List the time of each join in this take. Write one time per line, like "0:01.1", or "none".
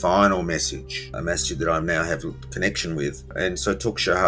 0:01.1
0:03.3